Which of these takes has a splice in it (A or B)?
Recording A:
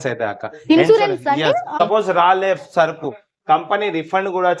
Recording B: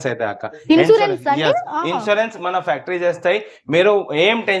A